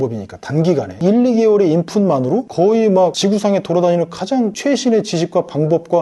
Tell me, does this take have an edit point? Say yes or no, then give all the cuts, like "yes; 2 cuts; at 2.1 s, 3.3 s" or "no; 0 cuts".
no; 0 cuts